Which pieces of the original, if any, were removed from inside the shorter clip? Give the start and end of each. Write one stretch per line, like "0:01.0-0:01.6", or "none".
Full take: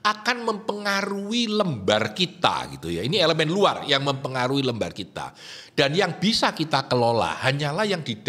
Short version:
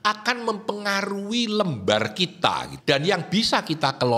0:02.7-0:05.6